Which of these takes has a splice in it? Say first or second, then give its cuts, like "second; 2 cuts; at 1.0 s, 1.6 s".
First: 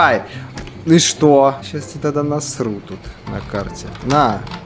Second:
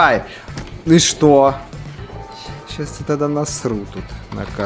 first; 1 cut; at 1.6 s